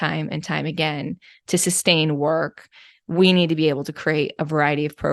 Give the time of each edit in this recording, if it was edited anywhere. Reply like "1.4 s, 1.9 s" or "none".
none